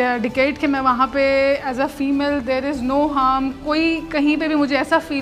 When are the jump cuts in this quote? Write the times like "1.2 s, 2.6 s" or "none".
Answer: none